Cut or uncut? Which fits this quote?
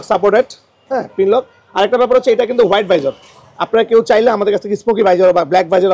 uncut